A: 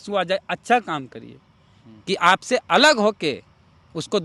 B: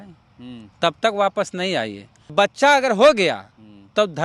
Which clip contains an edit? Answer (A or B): B